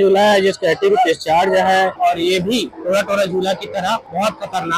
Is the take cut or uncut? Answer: cut